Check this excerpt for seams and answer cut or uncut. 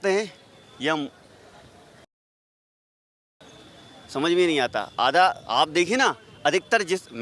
uncut